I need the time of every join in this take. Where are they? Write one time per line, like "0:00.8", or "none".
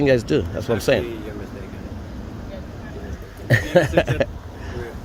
none